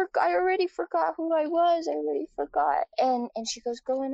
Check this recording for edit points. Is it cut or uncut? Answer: cut